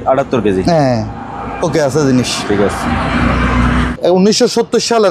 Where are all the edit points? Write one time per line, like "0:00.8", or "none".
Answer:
0:03.9